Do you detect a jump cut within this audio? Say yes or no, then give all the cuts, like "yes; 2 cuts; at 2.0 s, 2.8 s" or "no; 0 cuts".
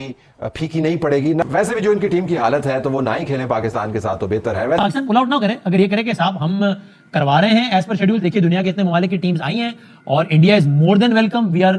yes; 2 cuts; at 1.4 s, 4.8 s